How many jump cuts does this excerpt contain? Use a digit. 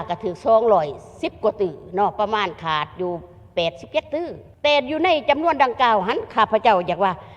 1